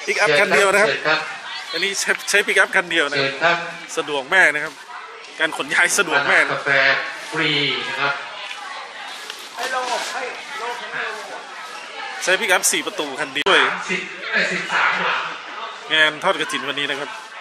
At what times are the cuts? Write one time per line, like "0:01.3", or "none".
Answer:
0:13.4